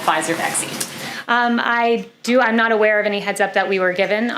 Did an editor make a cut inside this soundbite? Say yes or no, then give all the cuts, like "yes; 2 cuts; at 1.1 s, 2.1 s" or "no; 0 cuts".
no; 0 cuts